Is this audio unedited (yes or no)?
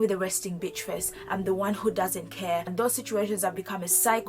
no